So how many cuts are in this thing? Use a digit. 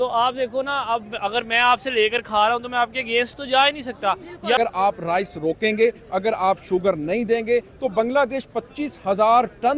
1